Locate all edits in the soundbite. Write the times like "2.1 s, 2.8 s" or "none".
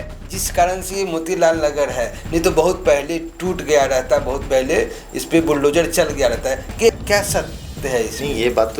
6.9 s